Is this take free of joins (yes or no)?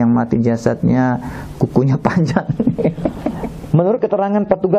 no